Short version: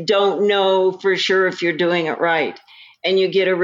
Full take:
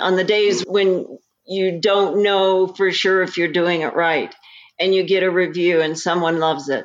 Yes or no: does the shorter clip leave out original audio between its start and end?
no